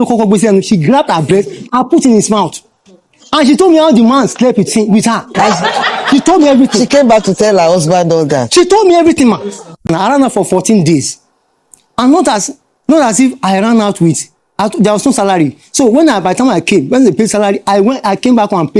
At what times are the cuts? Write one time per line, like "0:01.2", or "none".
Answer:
0:09.8